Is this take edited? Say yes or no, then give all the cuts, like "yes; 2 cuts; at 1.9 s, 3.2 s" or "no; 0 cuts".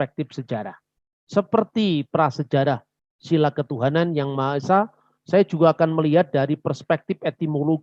no; 0 cuts